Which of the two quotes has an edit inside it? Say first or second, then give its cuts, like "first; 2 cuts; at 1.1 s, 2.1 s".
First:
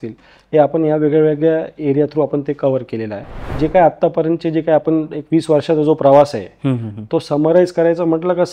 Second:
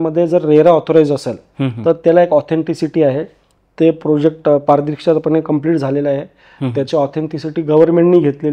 first; 1 cut; at 3.5 s